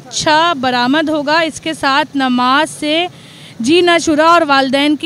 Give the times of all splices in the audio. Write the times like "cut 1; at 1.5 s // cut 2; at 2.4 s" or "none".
none